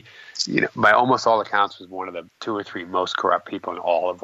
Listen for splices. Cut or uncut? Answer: cut